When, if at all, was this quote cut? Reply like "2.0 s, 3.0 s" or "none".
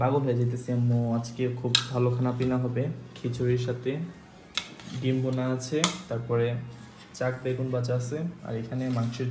none